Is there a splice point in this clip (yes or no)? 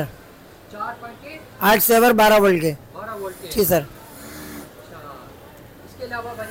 no